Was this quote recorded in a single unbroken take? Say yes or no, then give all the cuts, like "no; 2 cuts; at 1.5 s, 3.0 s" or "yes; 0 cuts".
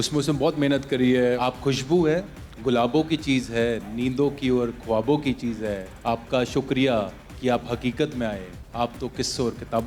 no; 3 cuts; at 1.4 s, 5.9 s, 8.5 s